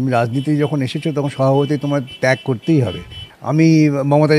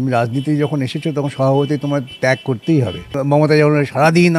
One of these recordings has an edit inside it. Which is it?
second; 1 cut; at 3.2 s

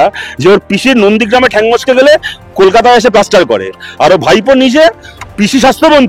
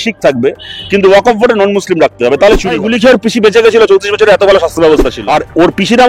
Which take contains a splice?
second; 2 cuts; at 2.8 s, 5.1 s

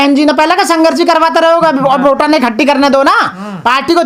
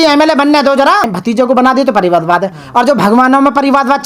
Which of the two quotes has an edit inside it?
second; 1 cut; at 1.1 s

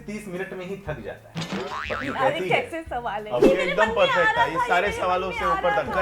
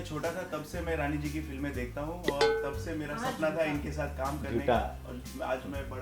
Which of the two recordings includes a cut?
first; 2 cuts; at 1.7 s, 3.4 s

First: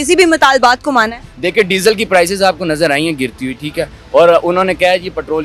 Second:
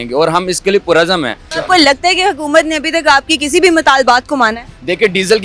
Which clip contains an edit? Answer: second; 1 cut; at 1.5 s

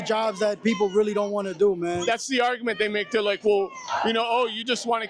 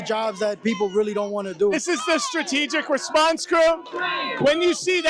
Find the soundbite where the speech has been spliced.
second; 1 cut; at 1.7 s

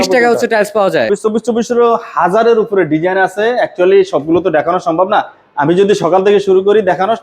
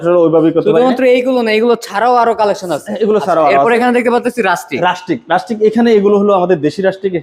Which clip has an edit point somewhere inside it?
first; 1 cut; at 1.1 s

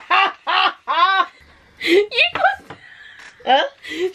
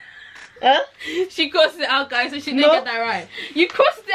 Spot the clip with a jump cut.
first; 1 cut; at 1.3 s

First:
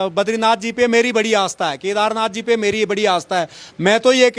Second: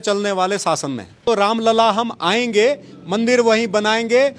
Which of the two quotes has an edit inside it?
second; 1 cut; at 1.2 s

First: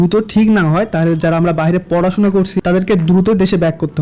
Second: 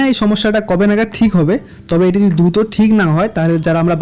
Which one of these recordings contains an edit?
first; 1 cut; at 2.5 s

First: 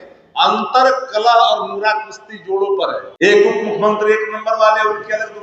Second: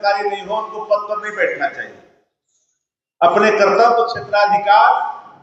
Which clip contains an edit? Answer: first; 1 cut; at 3.1 s

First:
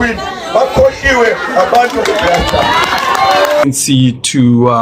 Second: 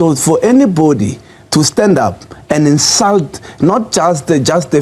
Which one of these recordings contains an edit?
first; 1 cut; at 3.6 s

